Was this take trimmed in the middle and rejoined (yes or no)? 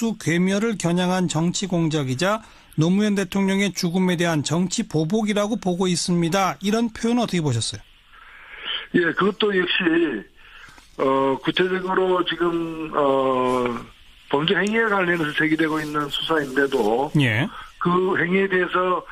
no